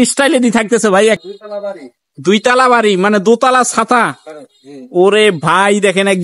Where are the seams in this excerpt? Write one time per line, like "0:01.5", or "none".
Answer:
0:01.2

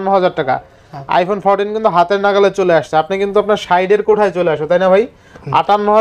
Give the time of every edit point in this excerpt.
none

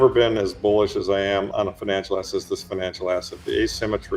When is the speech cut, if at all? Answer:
0:01.5

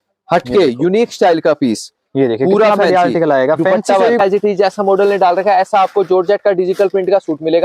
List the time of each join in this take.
0:04.2

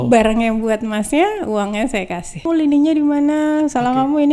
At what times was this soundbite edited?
0:02.4

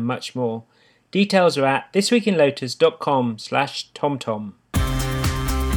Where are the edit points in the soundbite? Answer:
0:04.6

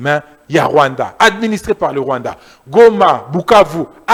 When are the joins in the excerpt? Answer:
none

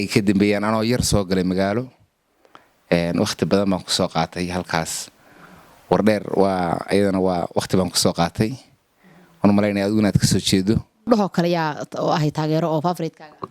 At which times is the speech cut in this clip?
0:10.9

